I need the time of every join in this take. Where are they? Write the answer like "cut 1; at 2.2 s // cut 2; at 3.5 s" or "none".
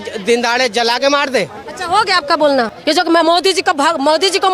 cut 1; at 2.8 s